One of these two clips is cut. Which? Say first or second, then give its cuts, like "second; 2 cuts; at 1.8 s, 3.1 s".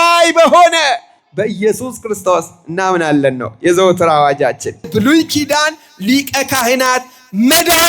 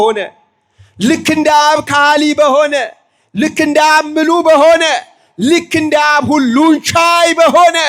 first; 1 cut; at 4.9 s